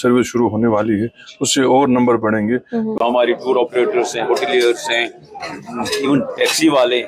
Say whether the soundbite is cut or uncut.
cut